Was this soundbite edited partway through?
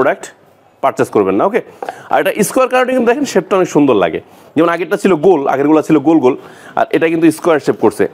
no; 0 cuts

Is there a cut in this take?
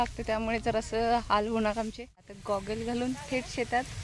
yes; 1 cut; at 2.3 s

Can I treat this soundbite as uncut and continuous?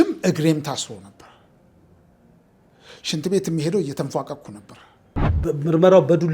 no; 1 cut; at 5.3 s

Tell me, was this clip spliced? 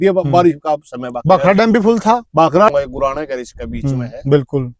yes; 1 cut; at 2.7 s

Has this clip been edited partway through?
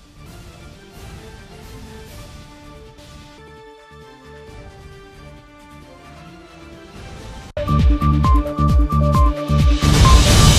no; 0 cuts

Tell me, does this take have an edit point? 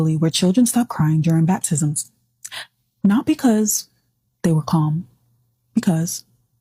no; 0 cuts

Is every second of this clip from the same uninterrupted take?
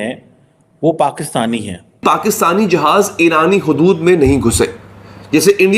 no; 1 cut; at 2.0 s

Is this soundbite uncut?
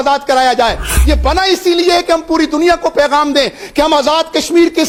yes; 0 cuts

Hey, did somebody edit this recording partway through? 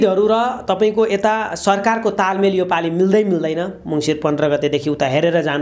no; 0 cuts

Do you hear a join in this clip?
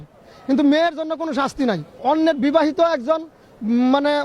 yes; 1 cut; at 1.9 s

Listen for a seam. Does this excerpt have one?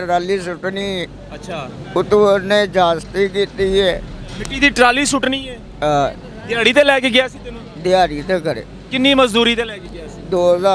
no; 0 cuts

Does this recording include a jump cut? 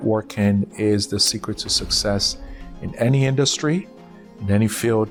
no; 0 cuts

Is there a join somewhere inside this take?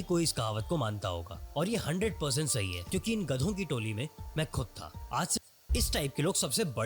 yes; 1 cut; at 5.4 s

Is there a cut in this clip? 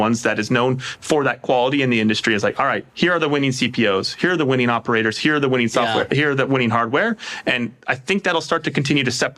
no; 0 cuts

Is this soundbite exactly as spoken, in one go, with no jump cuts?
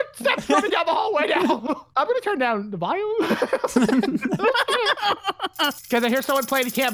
yes; 0 cuts

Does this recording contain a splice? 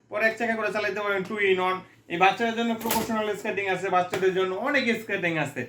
no; 0 cuts

